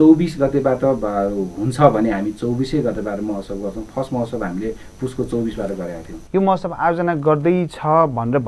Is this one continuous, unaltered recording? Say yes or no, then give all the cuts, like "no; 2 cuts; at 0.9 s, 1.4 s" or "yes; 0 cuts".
no; 1 cut; at 6.2 s